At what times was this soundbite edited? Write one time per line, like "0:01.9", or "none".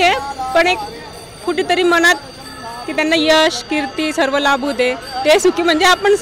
none